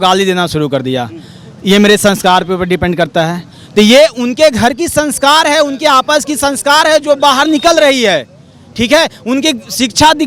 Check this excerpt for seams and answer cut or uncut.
uncut